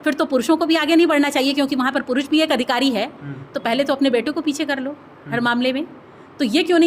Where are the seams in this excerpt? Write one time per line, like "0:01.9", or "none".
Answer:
none